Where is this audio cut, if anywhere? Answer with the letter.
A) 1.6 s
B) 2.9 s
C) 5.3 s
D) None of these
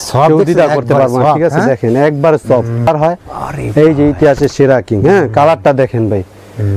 B